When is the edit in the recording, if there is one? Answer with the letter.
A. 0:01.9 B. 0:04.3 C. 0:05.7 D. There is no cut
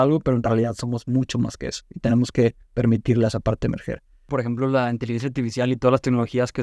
B